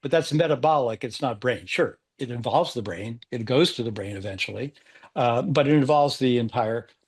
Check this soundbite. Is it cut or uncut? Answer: uncut